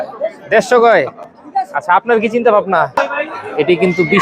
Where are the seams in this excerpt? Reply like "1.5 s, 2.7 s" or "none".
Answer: 3.0 s